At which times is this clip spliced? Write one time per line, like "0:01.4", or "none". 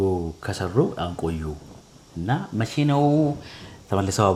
none